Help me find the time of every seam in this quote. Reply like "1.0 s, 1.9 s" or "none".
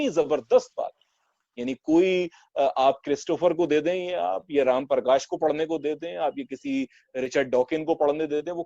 none